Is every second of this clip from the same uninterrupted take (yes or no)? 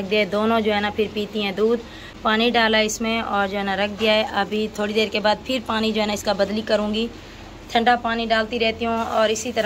yes